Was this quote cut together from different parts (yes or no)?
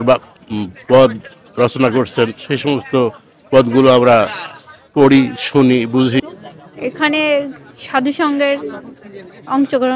yes